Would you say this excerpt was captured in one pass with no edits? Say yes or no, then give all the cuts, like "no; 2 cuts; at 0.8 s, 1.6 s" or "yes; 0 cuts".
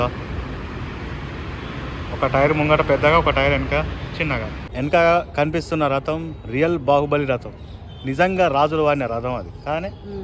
no; 1 cut; at 4.6 s